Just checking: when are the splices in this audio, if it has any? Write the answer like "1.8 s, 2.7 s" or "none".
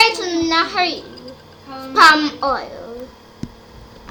none